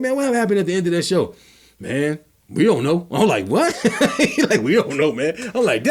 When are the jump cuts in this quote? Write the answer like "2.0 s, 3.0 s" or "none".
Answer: none